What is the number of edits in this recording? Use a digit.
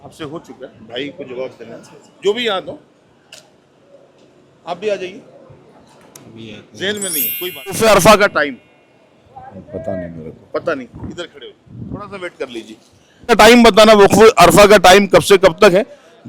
2